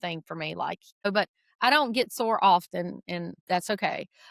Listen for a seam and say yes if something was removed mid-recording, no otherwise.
yes